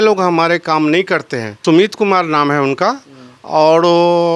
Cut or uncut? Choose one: cut